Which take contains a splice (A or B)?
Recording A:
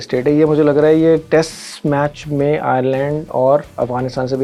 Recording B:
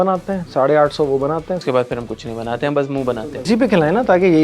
B